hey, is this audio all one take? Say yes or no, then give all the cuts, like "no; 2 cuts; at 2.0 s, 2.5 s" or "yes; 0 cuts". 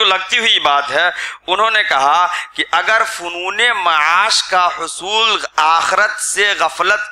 yes; 0 cuts